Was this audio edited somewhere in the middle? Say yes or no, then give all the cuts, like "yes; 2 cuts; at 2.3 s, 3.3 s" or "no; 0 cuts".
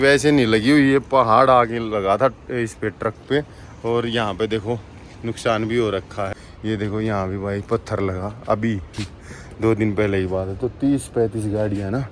yes; 1 cut; at 6.4 s